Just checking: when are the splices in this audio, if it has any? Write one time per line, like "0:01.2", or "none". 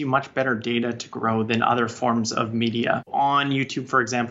0:03.1

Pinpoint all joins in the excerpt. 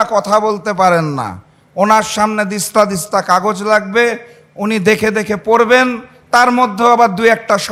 none

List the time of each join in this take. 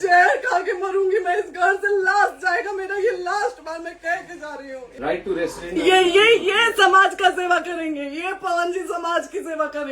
0:04.9

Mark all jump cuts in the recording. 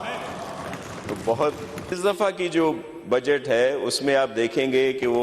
0:02.0

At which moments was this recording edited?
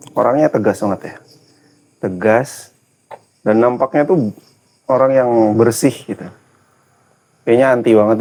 none

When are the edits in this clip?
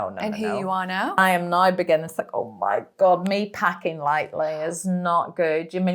0:01.2

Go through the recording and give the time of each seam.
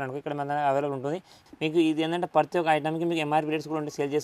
0:01.4

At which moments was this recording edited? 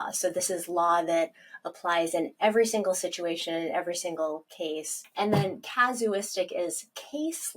0:05.0

